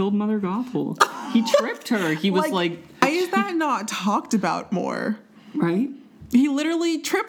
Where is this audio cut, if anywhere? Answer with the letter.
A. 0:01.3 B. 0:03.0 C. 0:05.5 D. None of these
B